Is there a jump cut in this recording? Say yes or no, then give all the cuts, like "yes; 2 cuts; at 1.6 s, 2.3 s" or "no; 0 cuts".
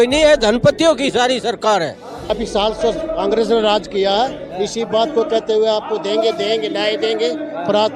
yes; 1 cut; at 2.3 s